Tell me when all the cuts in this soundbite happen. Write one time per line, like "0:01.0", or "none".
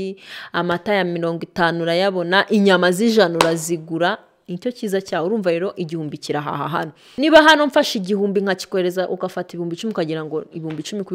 0:07.0

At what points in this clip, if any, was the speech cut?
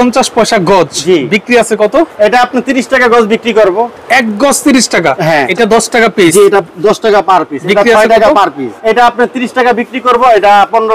0:05.5
0:08.7

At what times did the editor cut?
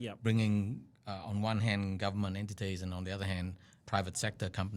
0:03.8

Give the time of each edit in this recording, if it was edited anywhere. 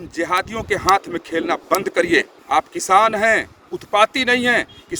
0:02.4

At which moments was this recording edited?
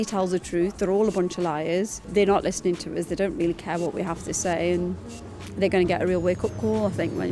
0:02.0

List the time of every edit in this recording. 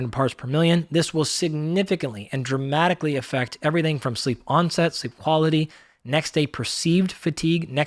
none

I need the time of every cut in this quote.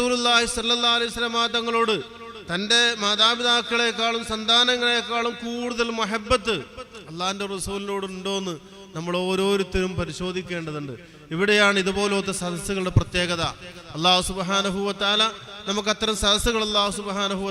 none

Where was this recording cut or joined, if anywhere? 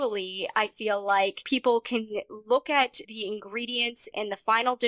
0:01.4
0:03.0

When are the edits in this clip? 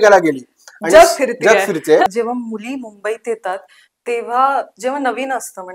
0:02.1

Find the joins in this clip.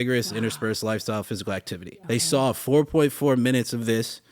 0:01.8

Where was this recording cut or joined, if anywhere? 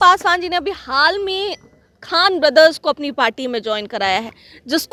none

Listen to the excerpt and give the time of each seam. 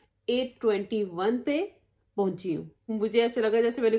0:02.8

